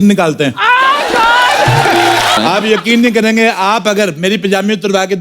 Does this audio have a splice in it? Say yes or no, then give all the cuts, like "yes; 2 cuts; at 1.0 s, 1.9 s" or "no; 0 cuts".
yes; 1 cut; at 2.4 s